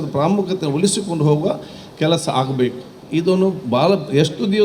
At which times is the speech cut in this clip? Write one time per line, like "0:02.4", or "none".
none

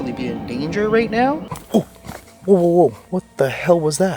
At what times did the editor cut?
0:01.5
0:03.0

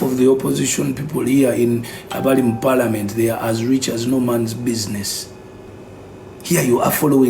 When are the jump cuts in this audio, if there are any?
0:05.7

